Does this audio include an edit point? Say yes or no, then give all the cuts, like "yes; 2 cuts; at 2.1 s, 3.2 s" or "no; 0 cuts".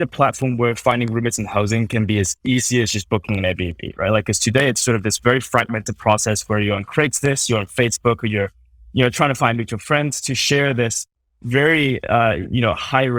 no; 0 cuts